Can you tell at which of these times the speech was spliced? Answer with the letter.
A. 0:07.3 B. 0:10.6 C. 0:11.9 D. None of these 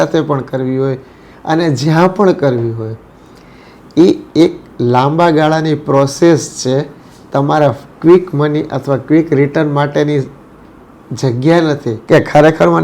C